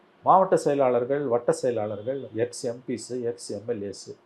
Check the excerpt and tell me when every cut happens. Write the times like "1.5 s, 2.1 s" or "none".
none